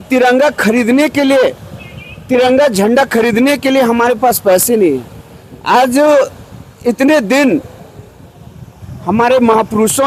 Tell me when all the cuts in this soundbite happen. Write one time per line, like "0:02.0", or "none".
none